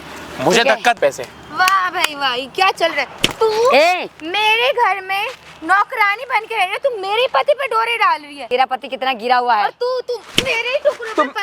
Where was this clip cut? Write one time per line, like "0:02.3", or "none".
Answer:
0:01.0
0:08.3

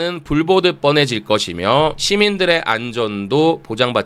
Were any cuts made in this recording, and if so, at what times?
none

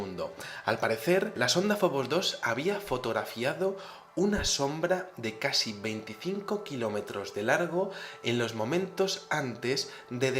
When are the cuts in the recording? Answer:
0:09.4

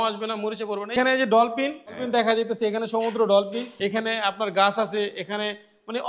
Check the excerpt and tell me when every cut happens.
0:00.9
0:01.9
0:03.7

